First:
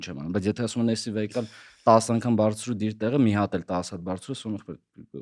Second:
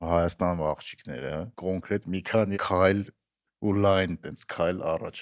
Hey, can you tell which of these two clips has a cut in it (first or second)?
second